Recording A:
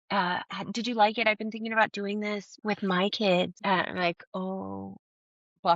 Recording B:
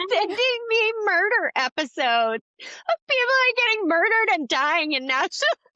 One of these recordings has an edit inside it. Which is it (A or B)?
A